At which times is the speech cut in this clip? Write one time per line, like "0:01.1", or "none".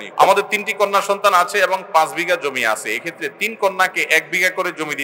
none